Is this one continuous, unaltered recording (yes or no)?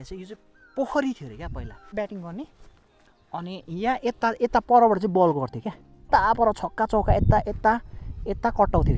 no